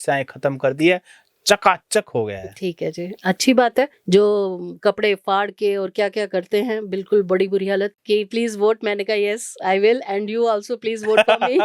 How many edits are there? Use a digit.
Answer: 2